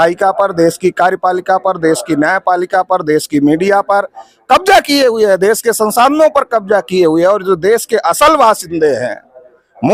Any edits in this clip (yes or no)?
no